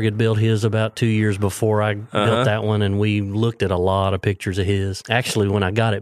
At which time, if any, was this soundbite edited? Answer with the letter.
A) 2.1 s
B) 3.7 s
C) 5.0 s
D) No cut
C